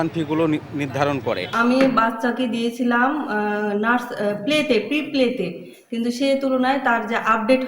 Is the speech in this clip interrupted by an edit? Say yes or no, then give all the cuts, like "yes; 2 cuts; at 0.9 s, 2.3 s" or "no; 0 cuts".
yes; 1 cut; at 1.5 s